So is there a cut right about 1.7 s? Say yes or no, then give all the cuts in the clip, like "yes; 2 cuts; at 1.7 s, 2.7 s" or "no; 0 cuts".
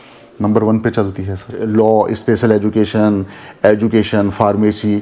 yes; 1 cut; at 1.7 s